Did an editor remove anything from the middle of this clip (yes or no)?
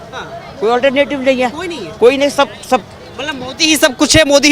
no